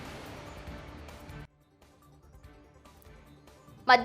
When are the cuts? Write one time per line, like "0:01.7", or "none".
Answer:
0:01.3